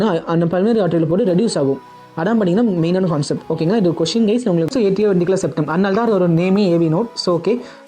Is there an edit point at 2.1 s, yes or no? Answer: no